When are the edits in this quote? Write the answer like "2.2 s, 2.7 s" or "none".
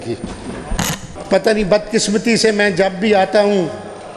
1.1 s